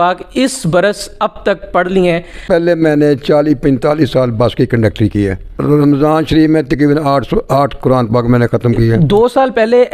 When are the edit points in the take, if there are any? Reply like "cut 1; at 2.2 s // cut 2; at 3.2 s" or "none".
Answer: cut 1; at 2.4 s // cut 2; at 5.5 s // cut 3; at 9.0 s